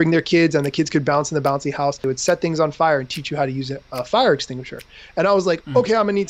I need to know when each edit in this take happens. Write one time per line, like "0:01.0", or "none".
0:02.0